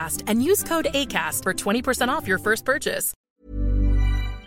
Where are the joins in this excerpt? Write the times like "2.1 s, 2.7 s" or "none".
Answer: 3.1 s